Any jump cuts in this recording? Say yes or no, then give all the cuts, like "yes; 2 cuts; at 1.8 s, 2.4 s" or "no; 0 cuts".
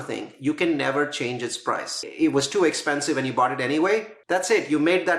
yes; 2 cuts; at 2.0 s, 4.1 s